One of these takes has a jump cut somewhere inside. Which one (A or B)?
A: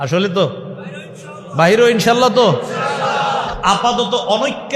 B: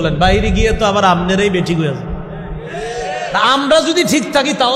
A